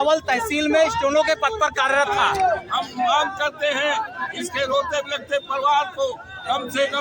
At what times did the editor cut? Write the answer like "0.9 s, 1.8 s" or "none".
2.7 s